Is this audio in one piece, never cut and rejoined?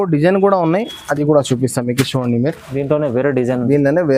yes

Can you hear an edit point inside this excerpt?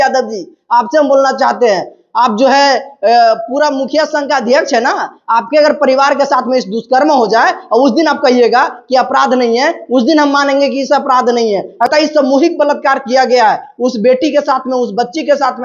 yes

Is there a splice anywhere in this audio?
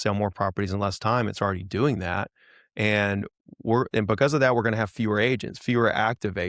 no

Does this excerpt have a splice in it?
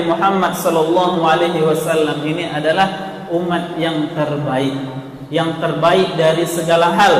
no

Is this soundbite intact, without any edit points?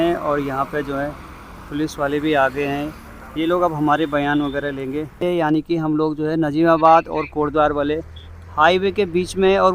no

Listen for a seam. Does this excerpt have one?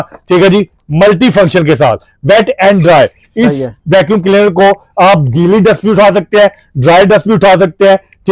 no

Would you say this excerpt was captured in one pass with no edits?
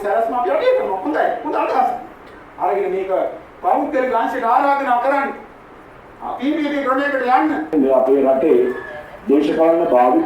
no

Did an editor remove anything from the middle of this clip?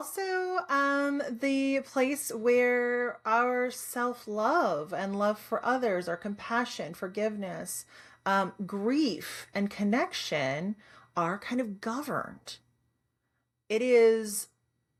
no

